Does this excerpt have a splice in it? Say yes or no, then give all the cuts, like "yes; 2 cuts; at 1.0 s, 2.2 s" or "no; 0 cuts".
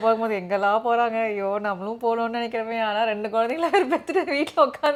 no; 0 cuts